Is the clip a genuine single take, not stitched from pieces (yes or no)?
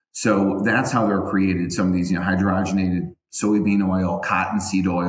yes